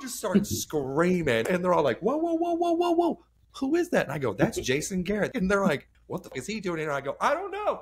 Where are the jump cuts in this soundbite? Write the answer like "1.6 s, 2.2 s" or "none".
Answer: 1.4 s, 5.3 s, 6.3 s